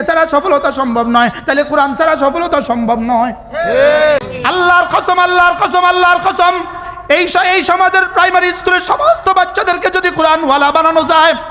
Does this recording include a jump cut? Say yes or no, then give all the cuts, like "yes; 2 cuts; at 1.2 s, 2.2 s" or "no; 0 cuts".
yes; 1 cut; at 4.3 s